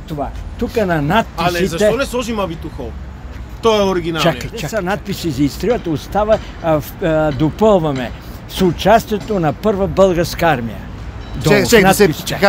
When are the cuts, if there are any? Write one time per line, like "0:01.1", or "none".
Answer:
0:04.8